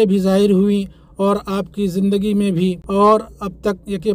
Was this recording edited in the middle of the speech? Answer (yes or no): no